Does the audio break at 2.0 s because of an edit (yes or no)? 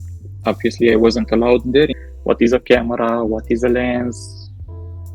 yes